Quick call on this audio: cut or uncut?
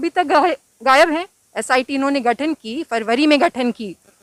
uncut